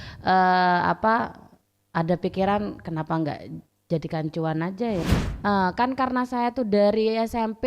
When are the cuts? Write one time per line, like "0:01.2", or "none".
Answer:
0:05.0